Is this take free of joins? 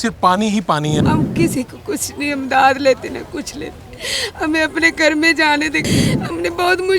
no; 2 cuts; at 1.0 s, 5.9 s

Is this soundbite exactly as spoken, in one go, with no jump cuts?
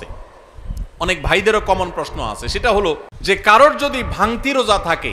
no; 1 cut; at 3.1 s

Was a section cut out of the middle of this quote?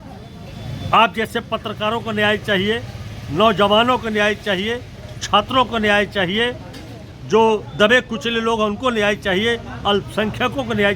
no; 0 cuts

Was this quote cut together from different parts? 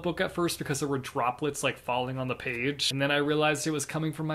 no; 0 cuts

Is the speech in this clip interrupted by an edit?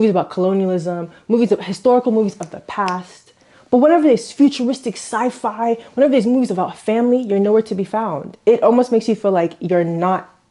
no; 0 cuts

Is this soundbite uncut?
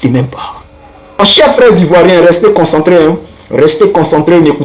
no; 1 cut; at 1.2 s

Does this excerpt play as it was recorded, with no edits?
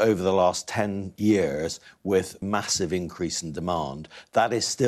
no; 2 cuts; at 1.1 s, 2.4 s

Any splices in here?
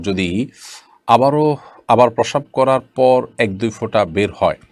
no; 0 cuts

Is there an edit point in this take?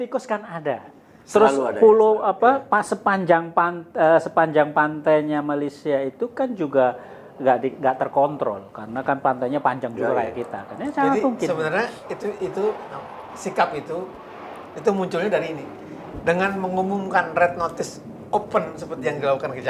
no; 0 cuts

